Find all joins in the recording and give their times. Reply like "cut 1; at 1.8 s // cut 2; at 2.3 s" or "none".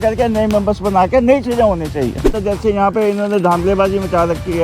cut 1; at 2.3 s